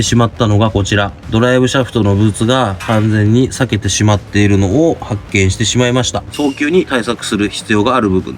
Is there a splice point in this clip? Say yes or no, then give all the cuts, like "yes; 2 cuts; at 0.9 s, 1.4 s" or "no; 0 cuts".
yes; 2 cuts; at 1.2 s, 6.3 s